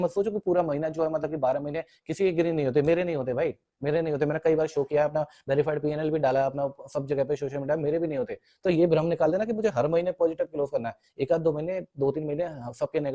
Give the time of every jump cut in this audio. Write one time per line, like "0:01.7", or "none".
none